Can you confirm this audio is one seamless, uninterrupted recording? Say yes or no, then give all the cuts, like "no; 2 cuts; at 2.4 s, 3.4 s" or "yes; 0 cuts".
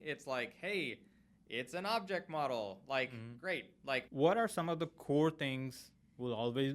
no; 1 cut; at 4.1 s